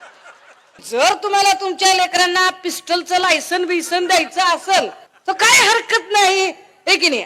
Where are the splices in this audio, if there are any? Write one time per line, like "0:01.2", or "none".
0:00.8
0:05.1